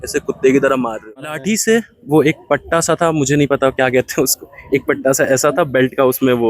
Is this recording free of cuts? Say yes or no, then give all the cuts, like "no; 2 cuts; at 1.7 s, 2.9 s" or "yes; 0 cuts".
no; 1 cut; at 1.4 s